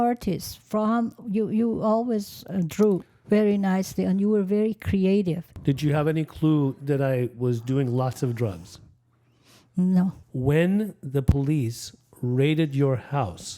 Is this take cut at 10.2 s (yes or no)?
yes